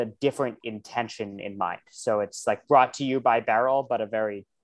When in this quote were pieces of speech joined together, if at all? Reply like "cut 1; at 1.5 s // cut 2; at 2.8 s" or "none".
none